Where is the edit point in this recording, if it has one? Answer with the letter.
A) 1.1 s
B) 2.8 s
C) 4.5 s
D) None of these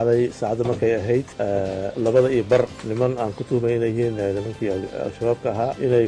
B